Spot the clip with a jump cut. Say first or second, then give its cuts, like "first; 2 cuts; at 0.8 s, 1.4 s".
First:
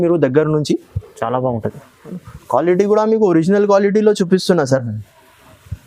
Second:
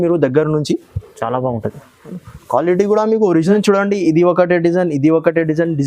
second; 1 cut; at 3.5 s